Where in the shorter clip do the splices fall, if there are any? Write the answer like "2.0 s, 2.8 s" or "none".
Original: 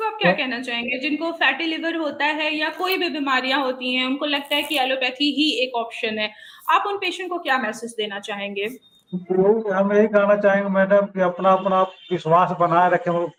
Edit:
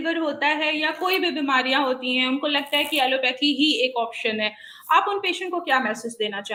none